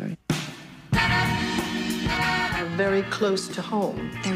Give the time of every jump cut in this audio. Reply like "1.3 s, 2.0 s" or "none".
2.6 s